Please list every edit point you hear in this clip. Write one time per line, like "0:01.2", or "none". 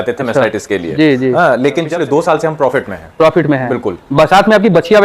0:01.9